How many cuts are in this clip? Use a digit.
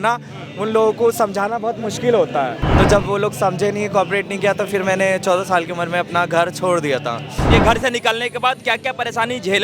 2